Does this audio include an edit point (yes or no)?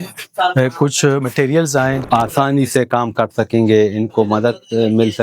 yes